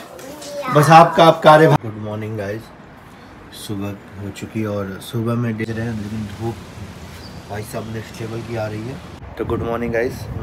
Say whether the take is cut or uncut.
cut